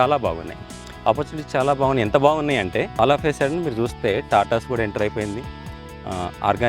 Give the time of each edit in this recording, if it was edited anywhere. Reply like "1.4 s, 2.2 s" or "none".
2.9 s